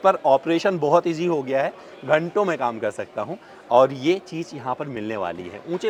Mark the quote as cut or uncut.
uncut